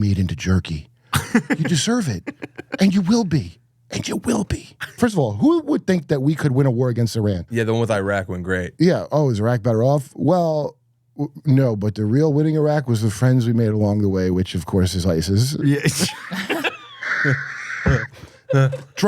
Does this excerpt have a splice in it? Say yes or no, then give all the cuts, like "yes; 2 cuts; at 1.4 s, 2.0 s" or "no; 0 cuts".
yes; 3 cuts; at 4.9 s, 7.4 s, 8.7 s